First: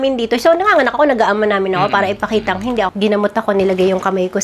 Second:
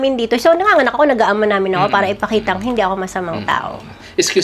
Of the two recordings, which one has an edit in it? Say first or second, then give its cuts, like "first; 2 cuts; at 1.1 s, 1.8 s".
first; 1 cut; at 2.9 s